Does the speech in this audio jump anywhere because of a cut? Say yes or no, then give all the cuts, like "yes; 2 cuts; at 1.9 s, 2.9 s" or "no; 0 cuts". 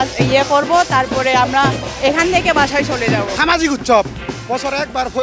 yes; 1 cut; at 3.3 s